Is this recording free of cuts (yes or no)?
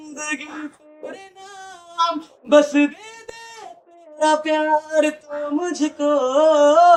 yes